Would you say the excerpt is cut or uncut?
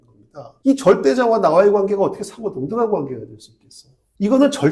uncut